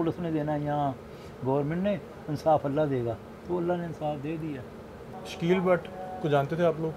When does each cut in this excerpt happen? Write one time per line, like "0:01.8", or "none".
0:05.1